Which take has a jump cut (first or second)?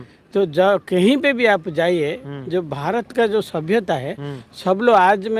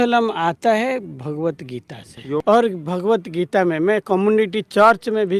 second